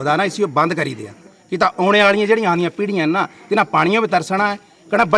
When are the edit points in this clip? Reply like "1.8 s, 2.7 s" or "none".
none